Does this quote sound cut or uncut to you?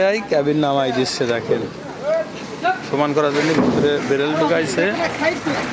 uncut